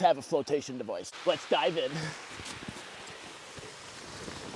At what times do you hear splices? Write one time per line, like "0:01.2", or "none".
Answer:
0:01.1

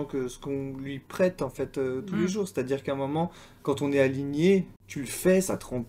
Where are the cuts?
0:04.8

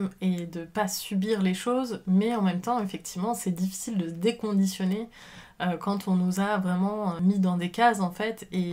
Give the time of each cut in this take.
none

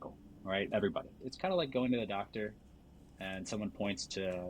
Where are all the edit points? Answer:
0:01.2

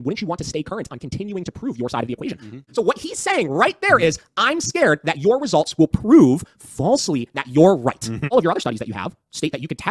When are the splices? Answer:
0:02.6
0:08.3

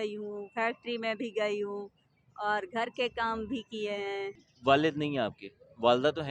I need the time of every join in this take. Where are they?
0:04.5

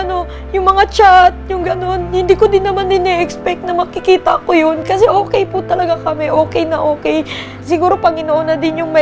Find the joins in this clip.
0:04.8
0:07.5

